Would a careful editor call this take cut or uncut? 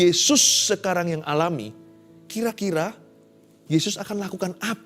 uncut